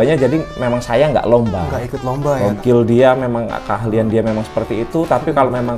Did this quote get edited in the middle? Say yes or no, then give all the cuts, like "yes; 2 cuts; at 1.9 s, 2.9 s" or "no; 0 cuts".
yes; 1 cut; at 2.6 s